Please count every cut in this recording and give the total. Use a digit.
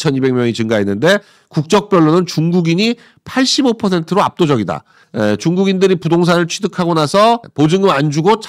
2